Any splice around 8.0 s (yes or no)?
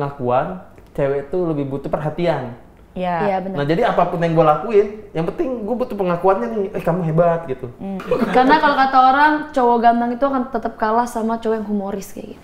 yes